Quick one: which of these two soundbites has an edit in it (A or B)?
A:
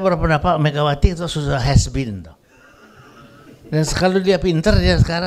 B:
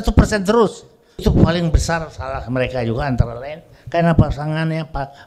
B